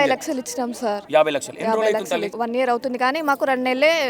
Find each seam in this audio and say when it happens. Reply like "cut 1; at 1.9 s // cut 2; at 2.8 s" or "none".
cut 1; at 1.0 s // cut 2; at 2.3 s